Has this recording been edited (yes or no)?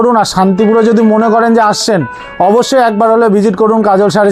no